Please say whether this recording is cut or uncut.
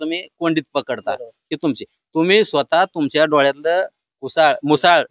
uncut